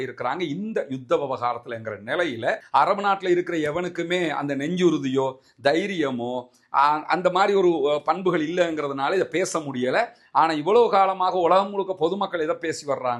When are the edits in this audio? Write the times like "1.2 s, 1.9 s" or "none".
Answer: 2.6 s